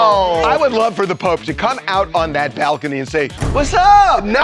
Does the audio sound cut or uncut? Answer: uncut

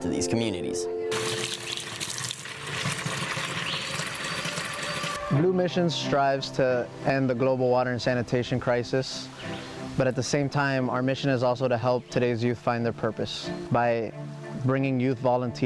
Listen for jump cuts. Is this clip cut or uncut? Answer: cut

